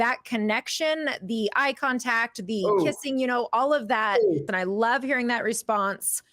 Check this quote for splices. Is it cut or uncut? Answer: cut